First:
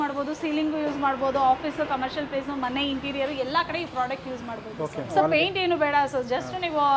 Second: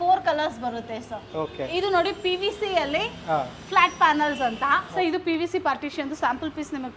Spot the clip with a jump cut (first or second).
second